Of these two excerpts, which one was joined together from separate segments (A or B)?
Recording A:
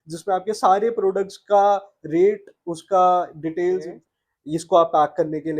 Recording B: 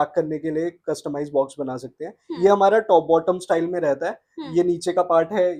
A